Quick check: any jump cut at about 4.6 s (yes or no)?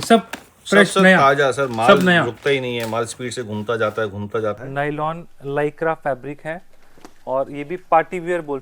yes